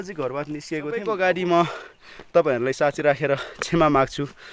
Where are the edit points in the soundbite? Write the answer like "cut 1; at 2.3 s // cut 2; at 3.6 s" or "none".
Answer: cut 1; at 1.0 s